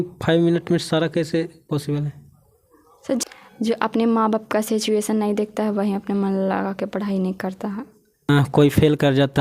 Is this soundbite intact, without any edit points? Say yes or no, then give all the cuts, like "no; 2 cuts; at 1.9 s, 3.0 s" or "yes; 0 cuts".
no; 1 cut; at 3.2 s